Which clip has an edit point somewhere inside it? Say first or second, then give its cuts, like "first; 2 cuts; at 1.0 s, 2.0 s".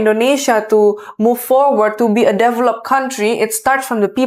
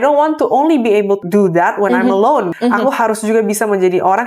second; 2 cuts; at 1.2 s, 2.5 s